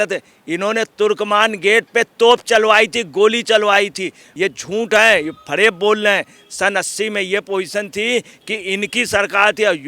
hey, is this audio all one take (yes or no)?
no